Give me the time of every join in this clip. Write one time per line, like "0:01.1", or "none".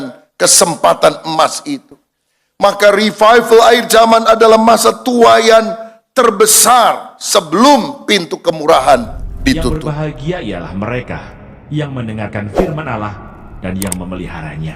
0:09.7